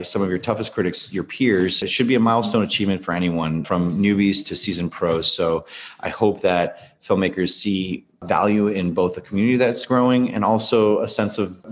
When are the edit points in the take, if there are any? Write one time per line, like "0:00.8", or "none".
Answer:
0:01.8
0:03.6

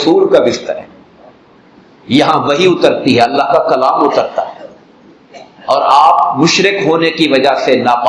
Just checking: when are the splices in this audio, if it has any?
none

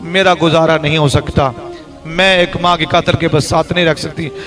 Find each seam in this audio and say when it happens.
none

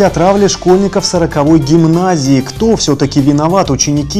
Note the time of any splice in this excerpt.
none

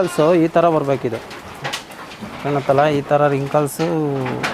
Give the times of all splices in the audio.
none

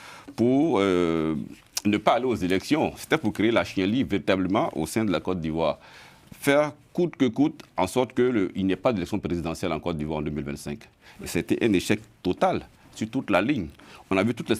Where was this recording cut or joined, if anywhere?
none

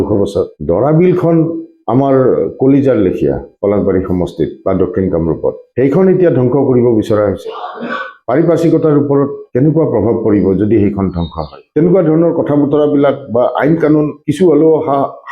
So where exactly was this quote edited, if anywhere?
0:11.6

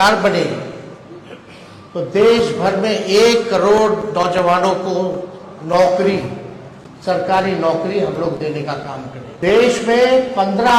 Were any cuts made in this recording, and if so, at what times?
0:09.2

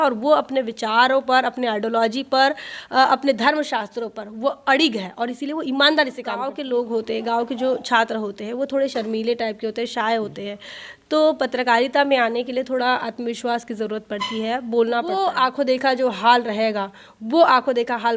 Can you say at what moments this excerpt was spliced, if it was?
0:06.5
0:15.2

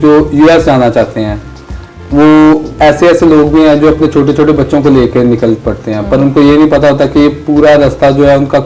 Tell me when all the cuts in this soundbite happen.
none

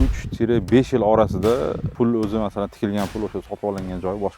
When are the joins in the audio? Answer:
0:01.9

